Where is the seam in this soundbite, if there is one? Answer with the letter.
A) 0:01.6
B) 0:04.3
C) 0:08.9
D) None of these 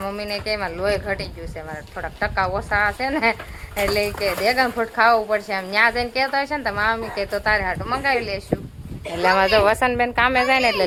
D